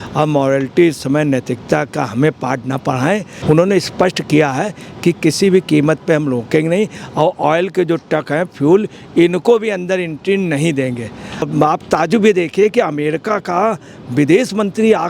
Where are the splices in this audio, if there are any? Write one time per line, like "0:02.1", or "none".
0:03.3
0:11.5